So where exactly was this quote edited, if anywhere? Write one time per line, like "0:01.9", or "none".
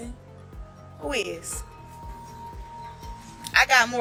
none